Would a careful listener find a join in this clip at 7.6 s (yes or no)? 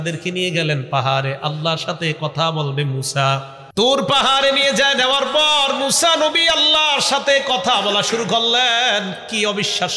no